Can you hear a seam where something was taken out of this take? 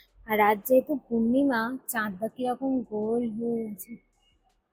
no; 0 cuts

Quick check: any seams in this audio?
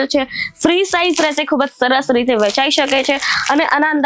no; 0 cuts

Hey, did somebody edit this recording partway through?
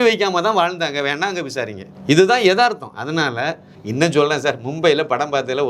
yes; 1 cut; at 3.8 s

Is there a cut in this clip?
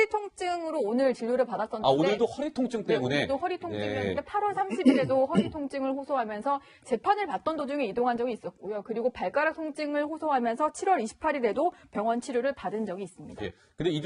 yes; 1 cut; at 3.5 s

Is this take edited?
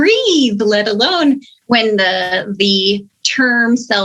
no; 0 cuts

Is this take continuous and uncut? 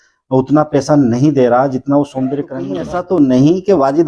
no; 1 cut; at 2.8 s

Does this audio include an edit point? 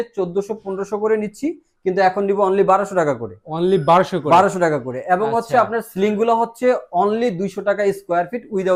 no; 0 cuts

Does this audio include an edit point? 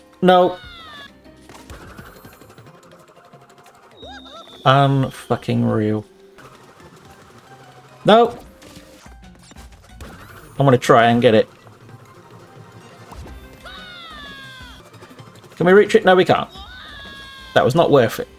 yes; 4 cuts; at 1.1 s, 6.4 s, 9.0 s, 14.8 s

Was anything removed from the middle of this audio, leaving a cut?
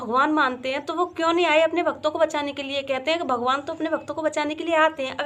no; 0 cuts

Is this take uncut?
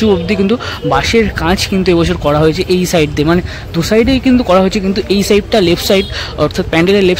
yes; 0 cuts

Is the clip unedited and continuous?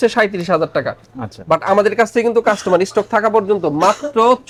yes; 0 cuts

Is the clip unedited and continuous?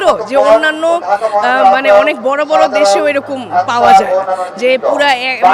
yes; 0 cuts

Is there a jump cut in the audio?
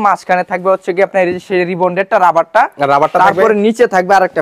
no; 0 cuts

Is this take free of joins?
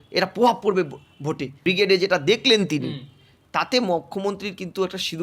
no; 1 cut; at 1.5 s

